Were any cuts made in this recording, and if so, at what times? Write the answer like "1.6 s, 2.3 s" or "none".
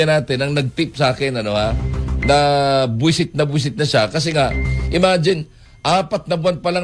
none

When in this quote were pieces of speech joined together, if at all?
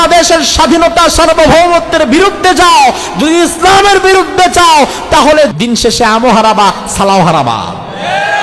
5.5 s

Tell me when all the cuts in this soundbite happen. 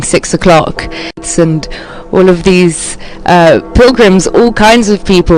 1.7 s

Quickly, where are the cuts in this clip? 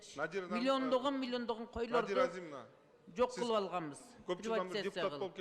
none

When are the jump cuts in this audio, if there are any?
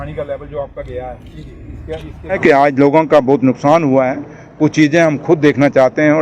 2.4 s

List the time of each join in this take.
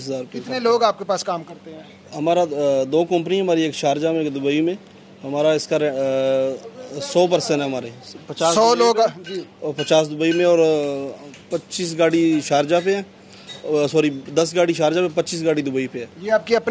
none

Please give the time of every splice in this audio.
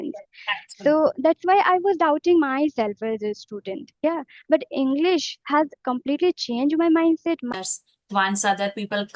7.5 s

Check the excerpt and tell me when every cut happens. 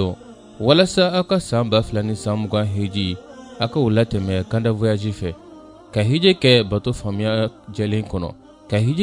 none

